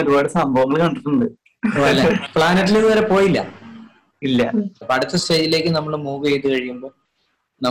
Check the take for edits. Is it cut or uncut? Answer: cut